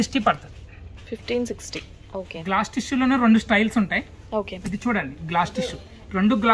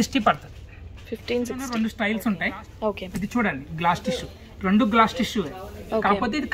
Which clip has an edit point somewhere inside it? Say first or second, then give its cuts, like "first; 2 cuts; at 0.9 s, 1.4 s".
second; 1 cut; at 1.5 s